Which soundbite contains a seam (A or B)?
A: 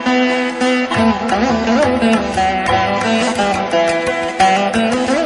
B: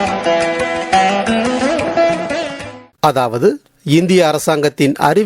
B